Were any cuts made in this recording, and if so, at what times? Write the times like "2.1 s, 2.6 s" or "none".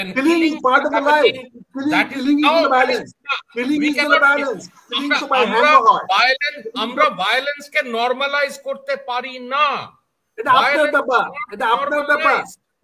none